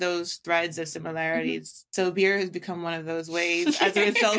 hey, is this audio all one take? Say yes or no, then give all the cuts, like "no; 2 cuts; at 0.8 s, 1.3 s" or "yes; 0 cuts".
yes; 0 cuts